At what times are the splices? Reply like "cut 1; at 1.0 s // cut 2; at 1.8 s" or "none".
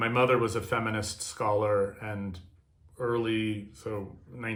none